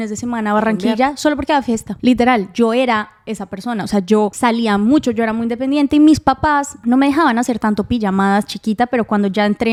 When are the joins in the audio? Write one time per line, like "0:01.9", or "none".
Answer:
none